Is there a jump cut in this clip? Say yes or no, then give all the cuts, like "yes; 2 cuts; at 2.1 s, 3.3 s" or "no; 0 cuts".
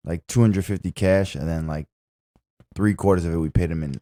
no; 0 cuts